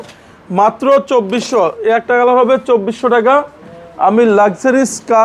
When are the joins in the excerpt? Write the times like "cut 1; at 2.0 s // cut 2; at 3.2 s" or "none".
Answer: none